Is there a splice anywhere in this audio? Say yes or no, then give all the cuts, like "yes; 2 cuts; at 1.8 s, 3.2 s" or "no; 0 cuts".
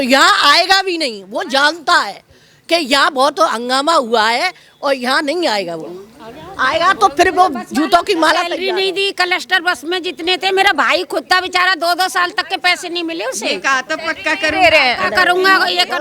no; 0 cuts